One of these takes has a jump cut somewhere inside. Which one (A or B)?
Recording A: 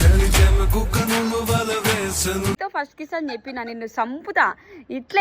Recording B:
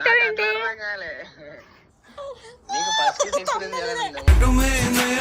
A